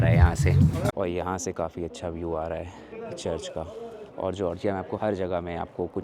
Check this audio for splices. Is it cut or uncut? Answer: cut